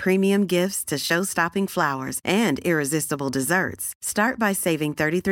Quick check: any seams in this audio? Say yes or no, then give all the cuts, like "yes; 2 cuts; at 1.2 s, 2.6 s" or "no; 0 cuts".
no; 0 cuts